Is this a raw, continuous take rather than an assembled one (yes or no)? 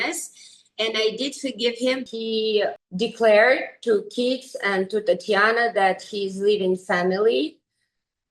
no